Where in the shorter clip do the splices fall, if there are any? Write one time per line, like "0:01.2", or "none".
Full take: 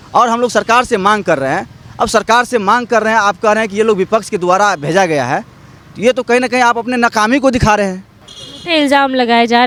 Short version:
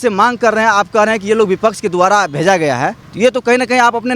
0:03.0

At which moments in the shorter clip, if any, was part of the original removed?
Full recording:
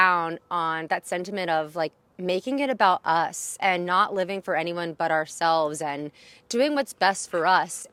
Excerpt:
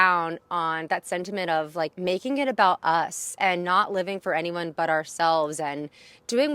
0:01.9

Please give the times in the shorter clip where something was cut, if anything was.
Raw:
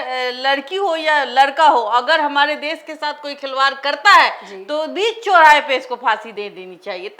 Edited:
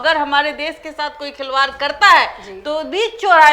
none

